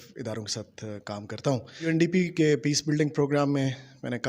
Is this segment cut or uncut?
cut